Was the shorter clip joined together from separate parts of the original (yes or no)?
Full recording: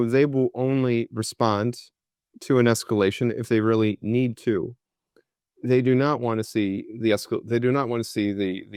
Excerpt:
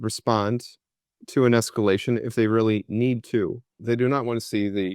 yes